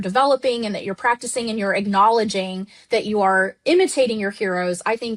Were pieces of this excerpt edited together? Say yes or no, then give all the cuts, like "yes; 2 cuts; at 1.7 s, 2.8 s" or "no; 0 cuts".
no; 0 cuts